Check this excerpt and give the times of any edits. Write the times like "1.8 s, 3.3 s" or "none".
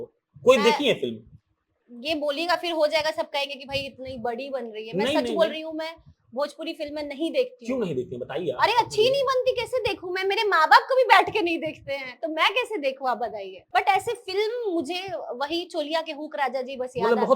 13.6 s